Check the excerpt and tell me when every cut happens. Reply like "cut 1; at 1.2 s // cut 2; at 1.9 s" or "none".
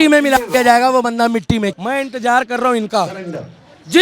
cut 1; at 1.7 s